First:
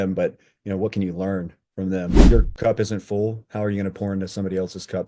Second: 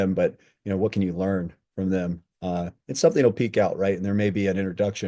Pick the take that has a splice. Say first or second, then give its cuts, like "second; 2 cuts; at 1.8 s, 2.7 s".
first; 1 cut; at 2.3 s